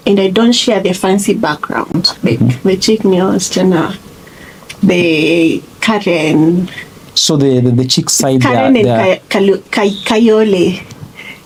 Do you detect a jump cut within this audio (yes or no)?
no